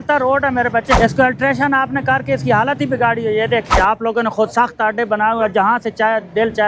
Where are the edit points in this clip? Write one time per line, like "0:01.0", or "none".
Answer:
0:01.0
0:03.7